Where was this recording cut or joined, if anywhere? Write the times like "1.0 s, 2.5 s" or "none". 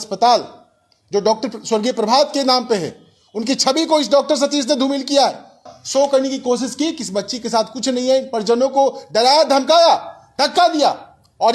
5.7 s